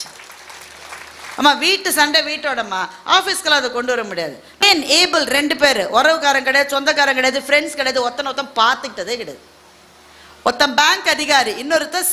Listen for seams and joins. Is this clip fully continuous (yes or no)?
no